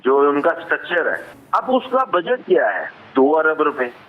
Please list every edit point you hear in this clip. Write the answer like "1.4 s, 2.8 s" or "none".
1.3 s